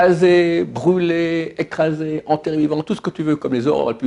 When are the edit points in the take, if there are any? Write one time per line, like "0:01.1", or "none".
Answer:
none